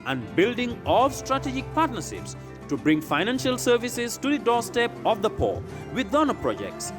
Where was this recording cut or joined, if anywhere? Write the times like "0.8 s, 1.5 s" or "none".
none

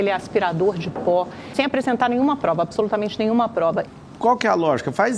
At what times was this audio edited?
1.6 s, 3.9 s

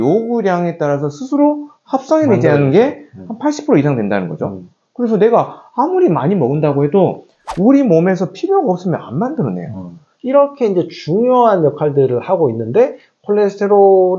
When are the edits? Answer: 10.1 s

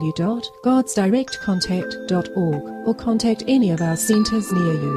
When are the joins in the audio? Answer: none

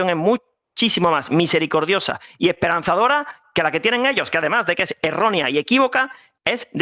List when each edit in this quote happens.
none

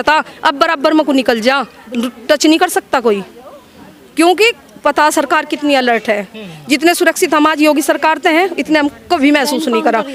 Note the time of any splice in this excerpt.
none

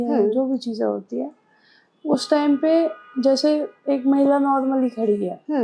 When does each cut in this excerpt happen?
none

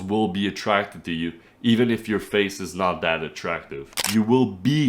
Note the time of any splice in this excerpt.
3.9 s

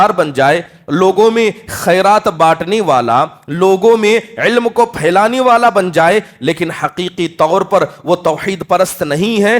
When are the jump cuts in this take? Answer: none

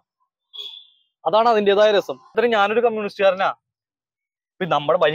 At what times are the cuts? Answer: 2.3 s

